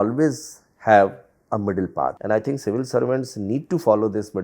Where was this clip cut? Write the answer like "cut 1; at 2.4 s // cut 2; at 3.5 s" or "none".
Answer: cut 1; at 2.2 s